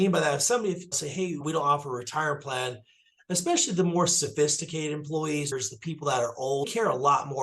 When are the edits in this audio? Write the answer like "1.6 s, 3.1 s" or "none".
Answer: 1.2 s, 5.5 s, 6.7 s